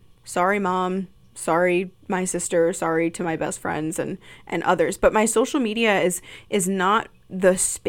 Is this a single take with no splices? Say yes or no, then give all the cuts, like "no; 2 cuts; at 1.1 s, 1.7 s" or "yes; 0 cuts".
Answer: yes; 0 cuts